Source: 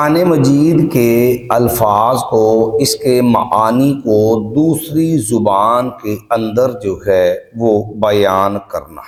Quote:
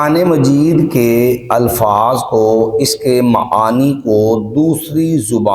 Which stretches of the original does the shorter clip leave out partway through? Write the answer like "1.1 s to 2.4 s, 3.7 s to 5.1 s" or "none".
none